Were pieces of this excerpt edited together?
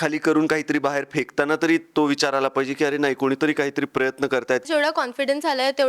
yes; 1 cut; at 4.6 s

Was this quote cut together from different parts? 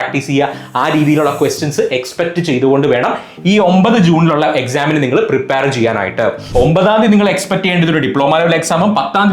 yes; 1 cut; at 6.4 s

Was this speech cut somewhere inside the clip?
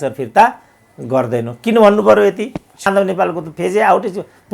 yes; 1 cut; at 2.9 s

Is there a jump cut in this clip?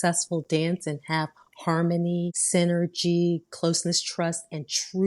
yes; 1 cut; at 2.4 s

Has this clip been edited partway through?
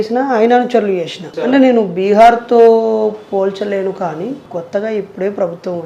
yes; 2 cuts; at 1.3 s, 4.4 s

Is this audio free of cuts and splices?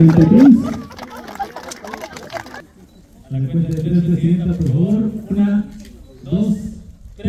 no; 1 cut; at 2.6 s

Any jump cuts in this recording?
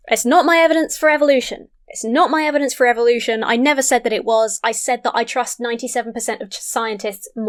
no; 0 cuts

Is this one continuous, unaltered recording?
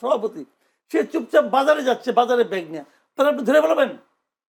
yes; 0 cuts

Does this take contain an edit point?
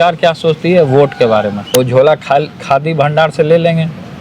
yes; 1 cut; at 1.7 s

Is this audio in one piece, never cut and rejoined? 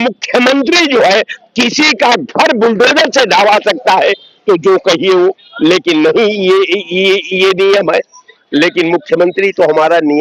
yes; 0 cuts

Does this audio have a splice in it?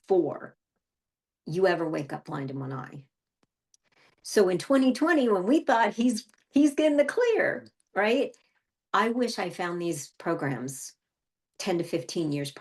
no; 0 cuts

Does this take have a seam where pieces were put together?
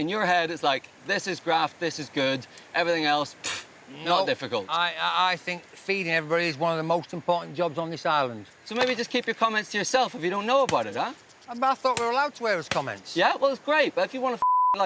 yes; 1 cut; at 8.5 s

